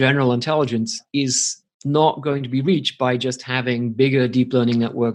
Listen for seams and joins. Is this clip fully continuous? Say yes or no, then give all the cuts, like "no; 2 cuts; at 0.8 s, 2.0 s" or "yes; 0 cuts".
yes; 0 cuts